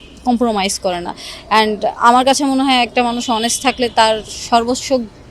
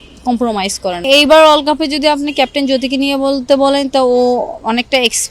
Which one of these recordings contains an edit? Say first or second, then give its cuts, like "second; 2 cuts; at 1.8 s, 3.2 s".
second; 1 cut; at 1.1 s